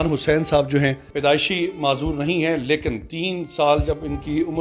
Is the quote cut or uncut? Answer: cut